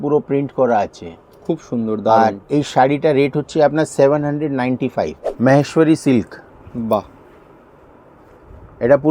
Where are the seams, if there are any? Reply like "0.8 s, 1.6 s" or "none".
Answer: 5.2 s

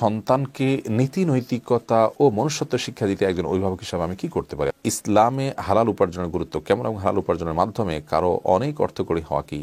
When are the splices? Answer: 4.8 s

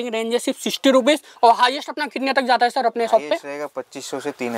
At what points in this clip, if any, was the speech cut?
none

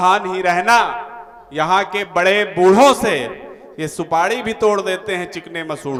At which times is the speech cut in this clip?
none

